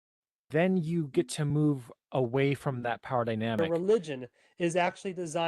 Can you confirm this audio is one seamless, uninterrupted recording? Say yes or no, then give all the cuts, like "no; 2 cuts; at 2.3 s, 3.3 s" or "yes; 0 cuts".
no; 1 cut; at 3.6 s